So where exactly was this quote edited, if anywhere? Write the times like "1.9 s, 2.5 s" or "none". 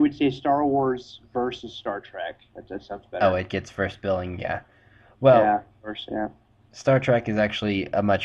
4.7 s